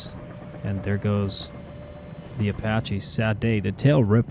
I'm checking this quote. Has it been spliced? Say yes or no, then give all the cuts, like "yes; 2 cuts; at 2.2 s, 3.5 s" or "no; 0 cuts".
no; 0 cuts